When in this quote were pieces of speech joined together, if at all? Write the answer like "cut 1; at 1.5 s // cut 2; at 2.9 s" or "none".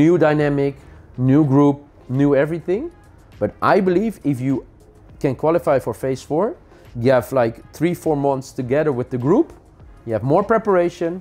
none